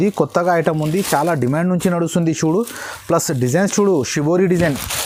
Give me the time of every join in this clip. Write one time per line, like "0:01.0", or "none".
none